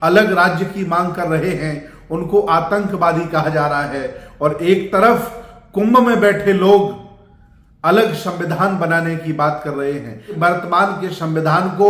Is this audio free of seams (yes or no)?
yes